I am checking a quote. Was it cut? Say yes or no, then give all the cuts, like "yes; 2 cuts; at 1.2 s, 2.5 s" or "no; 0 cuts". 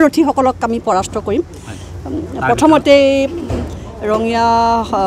yes; 1 cut; at 1.1 s